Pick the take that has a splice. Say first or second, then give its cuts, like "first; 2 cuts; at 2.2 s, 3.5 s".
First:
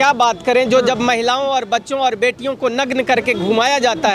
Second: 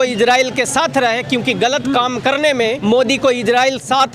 second; 1 cut; at 2.8 s